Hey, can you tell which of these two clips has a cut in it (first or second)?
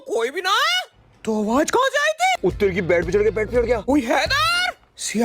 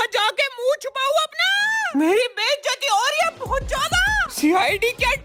first